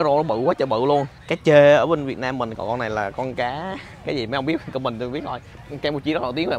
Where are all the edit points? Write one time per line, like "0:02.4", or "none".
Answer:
0:01.2
0:02.5
0:05.6